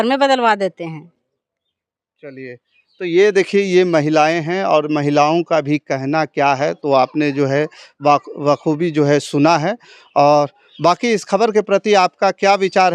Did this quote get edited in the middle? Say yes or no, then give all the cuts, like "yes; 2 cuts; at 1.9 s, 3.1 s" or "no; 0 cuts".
no; 0 cuts